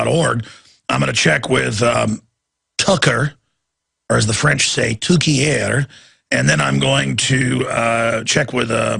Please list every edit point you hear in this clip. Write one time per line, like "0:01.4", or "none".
0:06.6